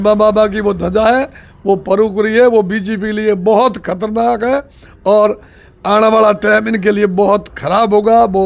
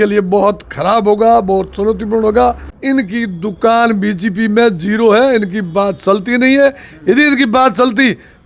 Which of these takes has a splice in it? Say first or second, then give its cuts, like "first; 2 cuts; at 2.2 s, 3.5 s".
second; 1 cut; at 2.7 s